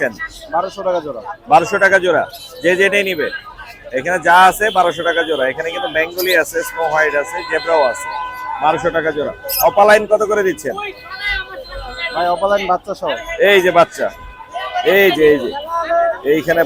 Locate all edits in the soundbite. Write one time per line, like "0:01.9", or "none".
none